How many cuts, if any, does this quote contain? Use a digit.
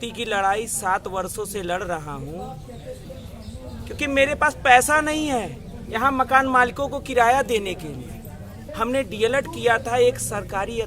2